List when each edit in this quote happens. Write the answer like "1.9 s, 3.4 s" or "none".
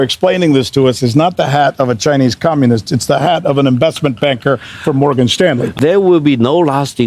5.7 s